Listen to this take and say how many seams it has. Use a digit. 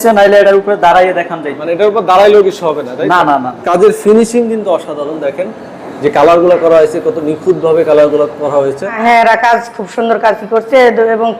2